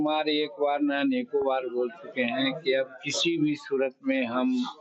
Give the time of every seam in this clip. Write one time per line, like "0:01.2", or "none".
none